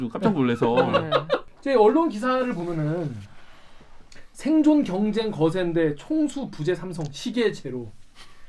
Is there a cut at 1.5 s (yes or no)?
yes